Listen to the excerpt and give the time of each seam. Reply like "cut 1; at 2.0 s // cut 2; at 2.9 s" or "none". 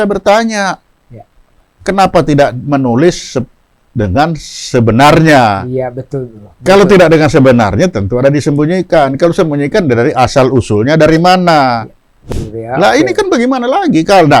cut 1; at 12.1 s